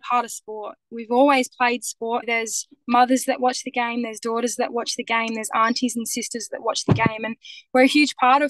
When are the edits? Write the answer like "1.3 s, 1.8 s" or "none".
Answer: 2.2 s